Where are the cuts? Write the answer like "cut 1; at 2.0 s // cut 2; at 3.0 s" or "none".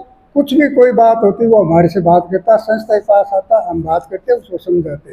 none